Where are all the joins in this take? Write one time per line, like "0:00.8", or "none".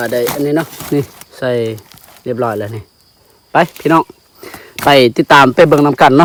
none